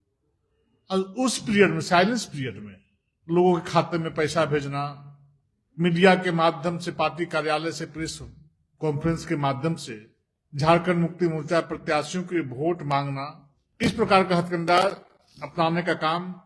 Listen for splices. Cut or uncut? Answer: uncut